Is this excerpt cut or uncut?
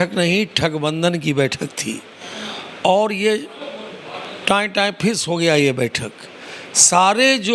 uncut